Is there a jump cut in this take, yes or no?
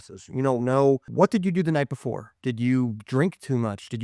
yes